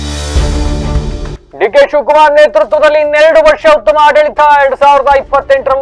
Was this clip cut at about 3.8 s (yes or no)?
no